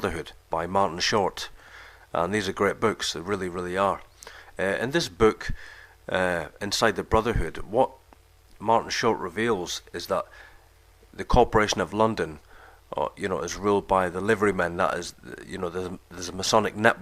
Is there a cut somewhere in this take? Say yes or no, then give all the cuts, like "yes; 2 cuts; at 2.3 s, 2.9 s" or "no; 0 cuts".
yes; 1 cut; at 6.5 s